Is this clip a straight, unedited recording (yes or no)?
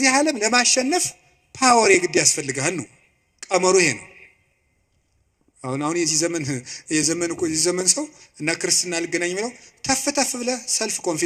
yes